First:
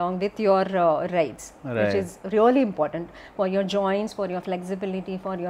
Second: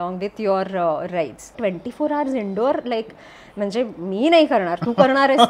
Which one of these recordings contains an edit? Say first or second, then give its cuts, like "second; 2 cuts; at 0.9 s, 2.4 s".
second; 1 cut; at 1.5 s